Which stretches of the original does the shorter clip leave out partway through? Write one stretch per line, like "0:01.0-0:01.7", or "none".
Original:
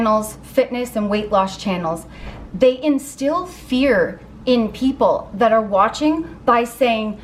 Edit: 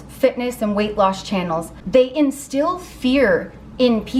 0:02.1-0:02.4